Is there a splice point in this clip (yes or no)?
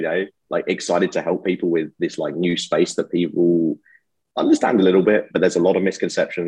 no